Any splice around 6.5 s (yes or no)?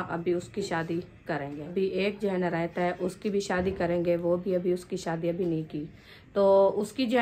yes